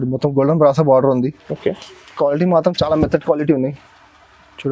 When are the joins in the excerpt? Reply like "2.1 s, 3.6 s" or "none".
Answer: none